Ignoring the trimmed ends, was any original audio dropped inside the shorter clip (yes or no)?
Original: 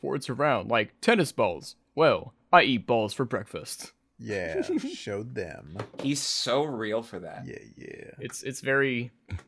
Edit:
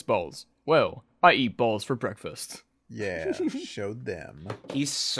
no